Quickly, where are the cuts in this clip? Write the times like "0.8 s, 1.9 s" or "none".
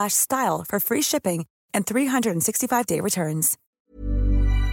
3.6 s